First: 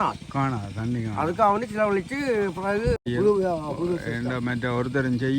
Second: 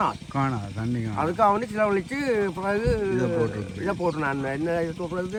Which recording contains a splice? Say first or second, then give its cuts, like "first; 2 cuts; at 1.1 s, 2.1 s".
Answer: first; 1 cut; at 3.0 s